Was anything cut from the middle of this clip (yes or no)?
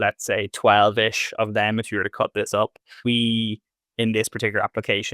yes